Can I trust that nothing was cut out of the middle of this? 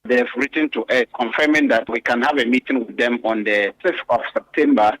no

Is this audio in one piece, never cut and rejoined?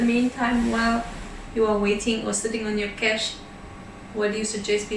yes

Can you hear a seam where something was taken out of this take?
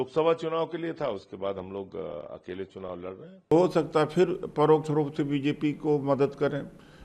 yes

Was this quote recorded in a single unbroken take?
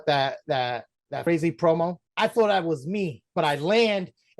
no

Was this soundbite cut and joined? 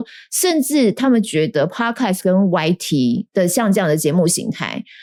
no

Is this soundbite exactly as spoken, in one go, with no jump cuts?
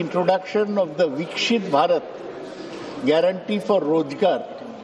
no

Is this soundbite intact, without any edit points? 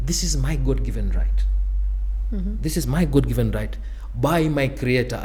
yes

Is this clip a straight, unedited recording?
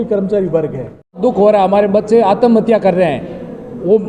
no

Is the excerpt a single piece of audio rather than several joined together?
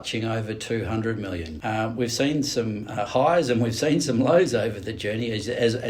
no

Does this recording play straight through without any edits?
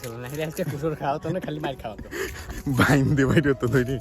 yes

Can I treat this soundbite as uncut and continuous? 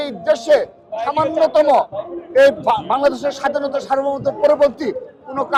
yes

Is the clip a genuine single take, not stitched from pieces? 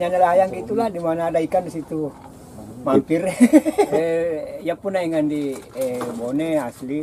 no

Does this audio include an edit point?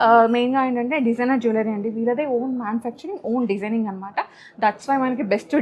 no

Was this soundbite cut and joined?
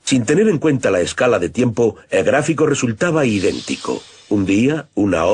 yes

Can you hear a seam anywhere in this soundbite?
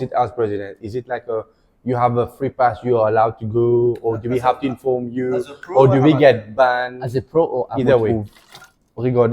yes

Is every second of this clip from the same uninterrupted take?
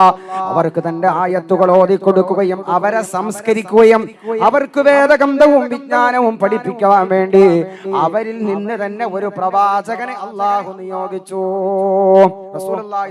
yes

